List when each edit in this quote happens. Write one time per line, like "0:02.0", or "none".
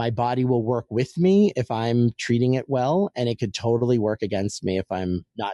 none